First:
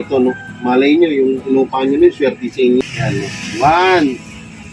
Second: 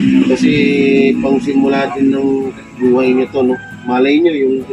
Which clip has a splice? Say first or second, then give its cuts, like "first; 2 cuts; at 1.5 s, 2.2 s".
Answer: first; 1 cut; at 2.8 s